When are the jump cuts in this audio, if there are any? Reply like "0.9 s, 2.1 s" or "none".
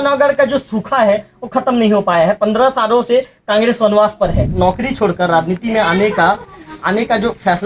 4.5 s